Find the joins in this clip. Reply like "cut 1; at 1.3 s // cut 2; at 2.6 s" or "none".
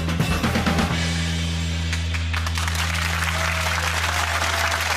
cut 1; at 2.6 s